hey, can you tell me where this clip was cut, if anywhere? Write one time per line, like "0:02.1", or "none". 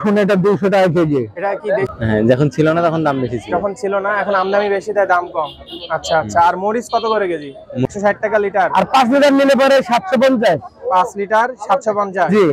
0:01.9
0:07.9